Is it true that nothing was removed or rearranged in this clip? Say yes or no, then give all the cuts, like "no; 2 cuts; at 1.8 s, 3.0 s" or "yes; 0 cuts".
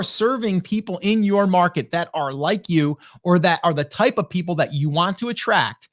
yes; 0 cuts